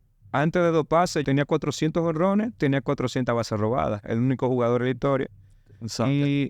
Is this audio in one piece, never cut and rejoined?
no; 1 cut; at 1.2 s

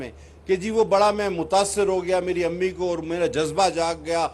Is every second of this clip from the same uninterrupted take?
yes; 0 cuts

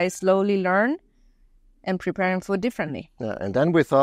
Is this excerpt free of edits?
yes; 0 cuts

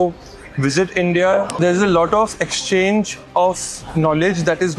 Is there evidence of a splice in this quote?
yes; 1 cut; at 1.5 s

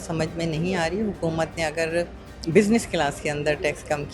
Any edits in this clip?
no; 0 cuts

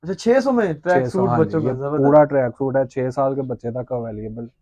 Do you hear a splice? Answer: no; 0 cuts

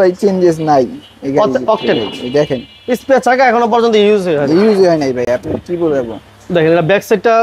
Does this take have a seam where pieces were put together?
no; 0 cuts

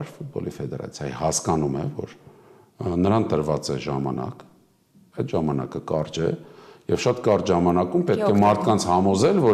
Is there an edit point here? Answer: no; 0 cuts

